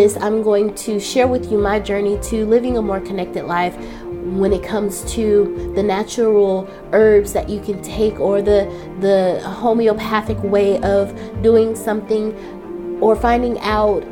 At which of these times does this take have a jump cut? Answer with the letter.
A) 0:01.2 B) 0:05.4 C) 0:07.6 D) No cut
D